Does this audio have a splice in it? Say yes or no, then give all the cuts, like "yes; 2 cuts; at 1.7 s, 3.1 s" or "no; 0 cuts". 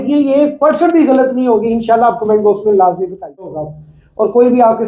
yes; 1 cut; at 3.5 s